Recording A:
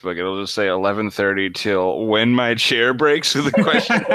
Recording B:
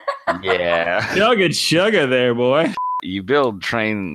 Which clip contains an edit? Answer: B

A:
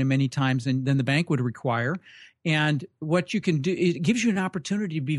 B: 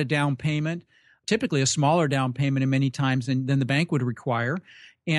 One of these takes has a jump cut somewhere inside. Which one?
B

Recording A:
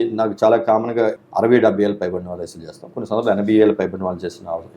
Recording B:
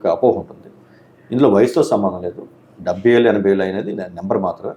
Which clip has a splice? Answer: A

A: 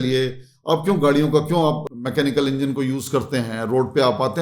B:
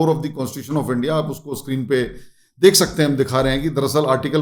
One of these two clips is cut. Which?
A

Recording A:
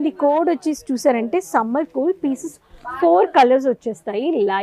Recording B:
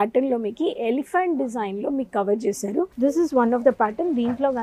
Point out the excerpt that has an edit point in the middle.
B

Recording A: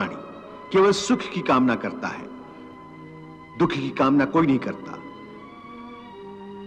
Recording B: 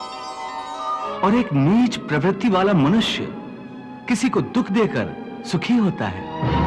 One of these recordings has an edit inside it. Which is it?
B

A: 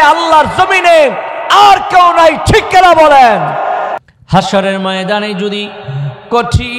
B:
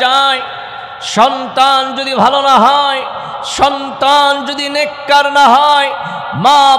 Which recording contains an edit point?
A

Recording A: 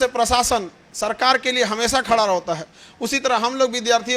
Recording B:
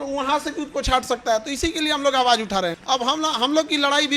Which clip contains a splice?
B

